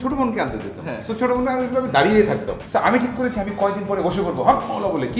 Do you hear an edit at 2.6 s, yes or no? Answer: yes